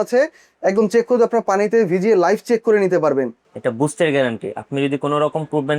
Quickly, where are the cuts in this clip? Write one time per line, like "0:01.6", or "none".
0:03.4